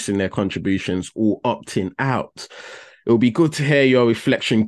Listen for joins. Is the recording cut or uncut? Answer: uncut